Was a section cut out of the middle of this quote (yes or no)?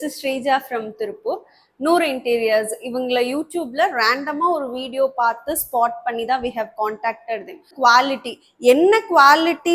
yes